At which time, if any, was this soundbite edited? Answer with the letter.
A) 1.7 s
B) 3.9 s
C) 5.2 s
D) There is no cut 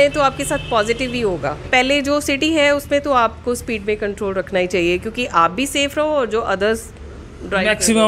A